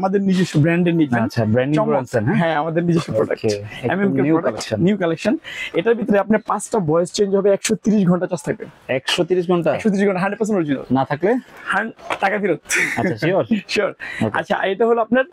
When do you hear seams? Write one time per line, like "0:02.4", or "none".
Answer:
none